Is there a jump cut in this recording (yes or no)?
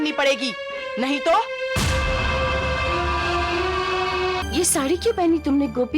yes